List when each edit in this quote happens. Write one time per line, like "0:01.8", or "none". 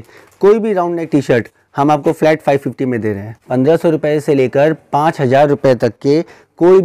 0:03.4